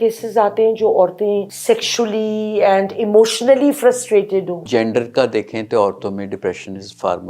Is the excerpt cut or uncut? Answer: cut